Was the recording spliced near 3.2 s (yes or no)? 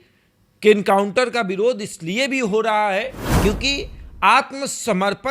yes